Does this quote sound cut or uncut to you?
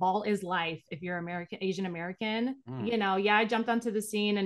uncut